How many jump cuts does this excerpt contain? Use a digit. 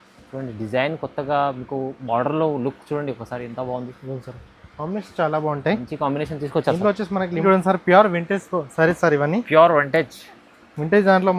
1